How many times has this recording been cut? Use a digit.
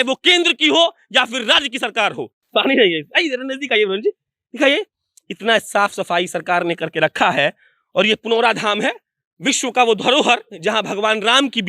1